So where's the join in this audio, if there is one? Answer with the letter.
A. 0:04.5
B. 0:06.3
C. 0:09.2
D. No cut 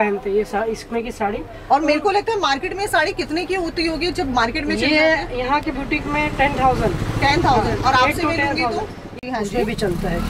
C